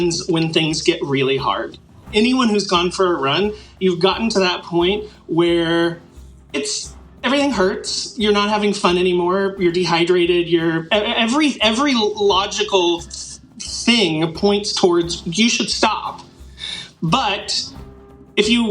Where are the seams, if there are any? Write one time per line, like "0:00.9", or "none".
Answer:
0:01.8